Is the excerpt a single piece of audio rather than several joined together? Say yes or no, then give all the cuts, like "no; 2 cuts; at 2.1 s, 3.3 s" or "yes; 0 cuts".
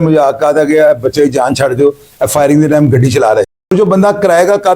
no; 1 cut; at 3.5 s